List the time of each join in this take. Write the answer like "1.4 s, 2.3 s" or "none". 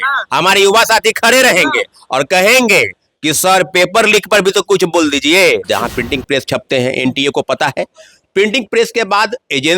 5.6 s